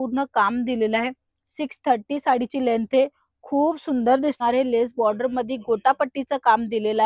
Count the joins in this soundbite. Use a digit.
1